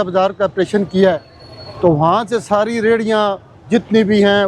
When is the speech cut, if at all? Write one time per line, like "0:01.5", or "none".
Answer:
none

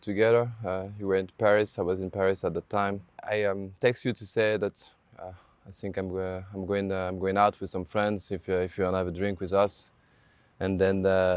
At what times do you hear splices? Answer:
0:03.2

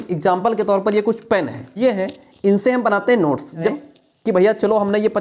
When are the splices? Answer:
0:01.7
0:03.7

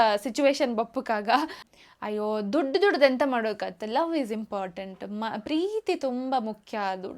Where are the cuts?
0:01.6

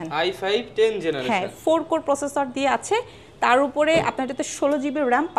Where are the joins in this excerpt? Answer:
none

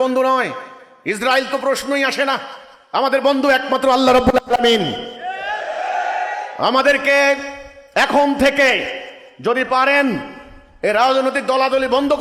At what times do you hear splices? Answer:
none

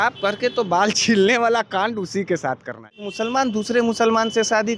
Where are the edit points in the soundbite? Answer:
0:03.1

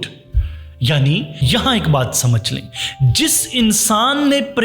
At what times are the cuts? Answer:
0:01.3

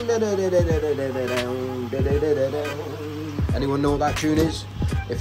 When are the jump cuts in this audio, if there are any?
none

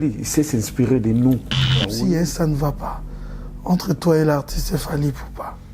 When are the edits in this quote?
0:01.9

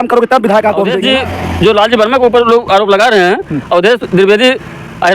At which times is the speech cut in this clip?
0:01.0

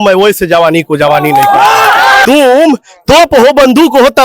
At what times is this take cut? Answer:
0:02.2

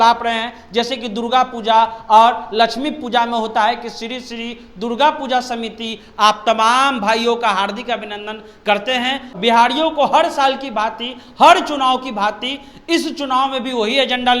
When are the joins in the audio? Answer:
0:09.3

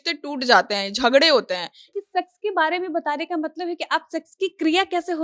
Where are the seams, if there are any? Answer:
0:01.9

